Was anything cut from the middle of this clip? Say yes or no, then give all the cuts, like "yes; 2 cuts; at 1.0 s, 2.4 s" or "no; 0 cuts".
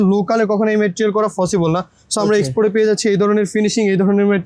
no; 0 cuts